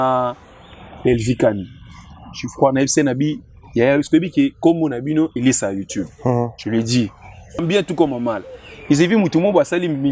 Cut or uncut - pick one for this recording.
cut